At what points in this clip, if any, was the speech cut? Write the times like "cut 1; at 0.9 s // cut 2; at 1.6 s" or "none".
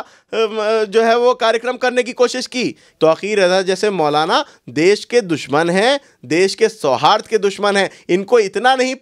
cut 1; at 2.9 s